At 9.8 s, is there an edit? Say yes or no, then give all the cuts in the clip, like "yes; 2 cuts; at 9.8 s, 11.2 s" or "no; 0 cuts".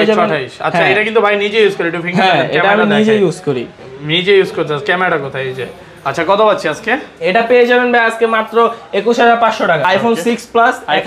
yes; 1 cut; at 9.8 s